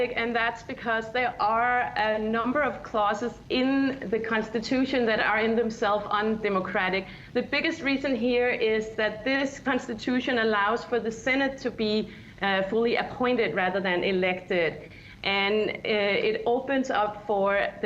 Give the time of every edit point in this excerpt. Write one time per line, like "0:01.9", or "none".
0:07.7